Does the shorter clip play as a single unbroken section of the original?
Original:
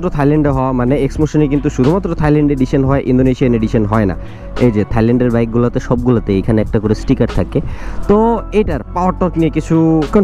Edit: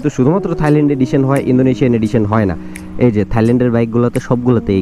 yes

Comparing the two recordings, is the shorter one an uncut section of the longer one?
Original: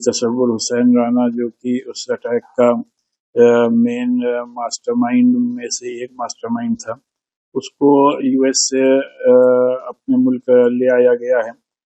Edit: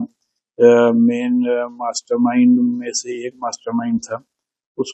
yes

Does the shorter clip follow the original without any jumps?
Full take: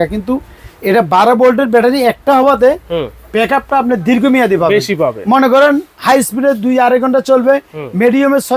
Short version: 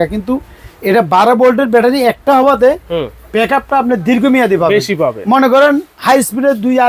yes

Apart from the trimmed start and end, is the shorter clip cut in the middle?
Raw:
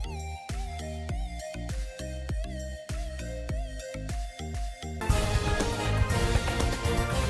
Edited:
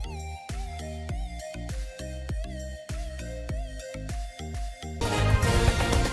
yes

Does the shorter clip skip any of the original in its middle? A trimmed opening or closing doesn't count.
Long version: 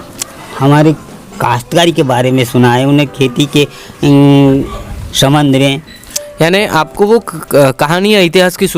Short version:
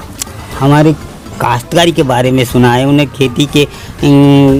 no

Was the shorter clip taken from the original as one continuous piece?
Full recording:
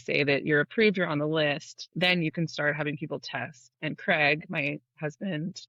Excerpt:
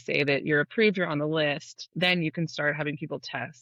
yes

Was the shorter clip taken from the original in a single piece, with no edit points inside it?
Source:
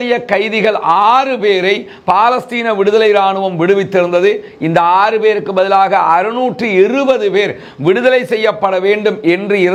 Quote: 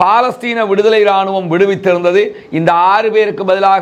yes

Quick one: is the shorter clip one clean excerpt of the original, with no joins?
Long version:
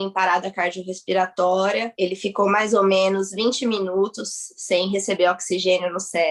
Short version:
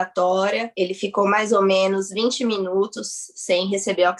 yes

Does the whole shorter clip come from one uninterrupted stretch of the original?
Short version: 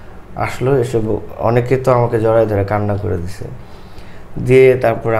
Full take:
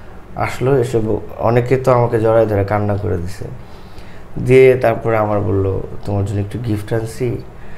yes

